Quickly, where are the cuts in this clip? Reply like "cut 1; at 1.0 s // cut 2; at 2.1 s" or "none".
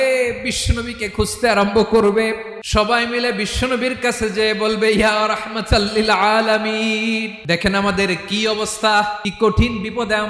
cut 1; at 2.5 s // cut 2; at 7.3 s // cut 3; at 9.2 s